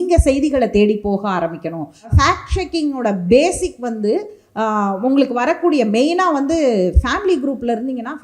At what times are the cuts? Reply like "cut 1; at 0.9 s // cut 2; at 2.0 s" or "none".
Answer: cut 1; at 2.1 s